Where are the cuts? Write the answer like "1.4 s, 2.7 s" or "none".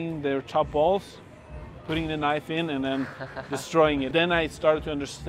4.1 s